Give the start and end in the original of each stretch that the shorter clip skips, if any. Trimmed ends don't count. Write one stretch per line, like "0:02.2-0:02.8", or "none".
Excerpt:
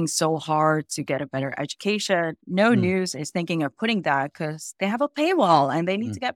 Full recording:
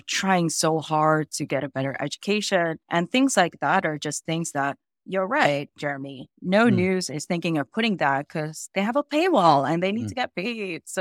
0:02.8-0:06.3